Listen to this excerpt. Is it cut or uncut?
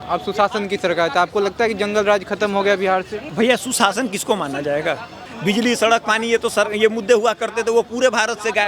cut